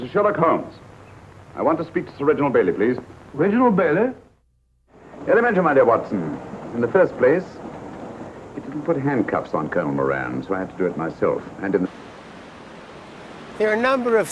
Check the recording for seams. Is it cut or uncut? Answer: uncut